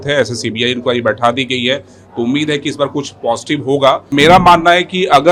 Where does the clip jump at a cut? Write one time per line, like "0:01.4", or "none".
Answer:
0:04.1